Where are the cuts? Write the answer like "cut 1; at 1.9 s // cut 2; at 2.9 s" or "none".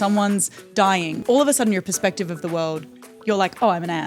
cut 1; at 1.2 s // cut 2; at 3.1 s